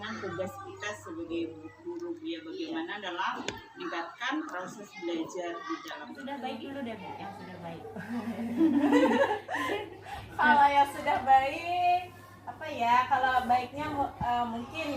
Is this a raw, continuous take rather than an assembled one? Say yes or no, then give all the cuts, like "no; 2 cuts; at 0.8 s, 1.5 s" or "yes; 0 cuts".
no; 1 cut; at 6.2 s